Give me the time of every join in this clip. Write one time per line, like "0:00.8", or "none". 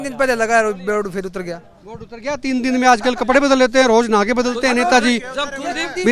none